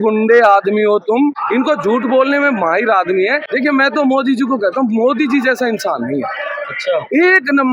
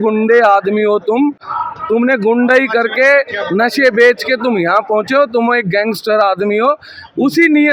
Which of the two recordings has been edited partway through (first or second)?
first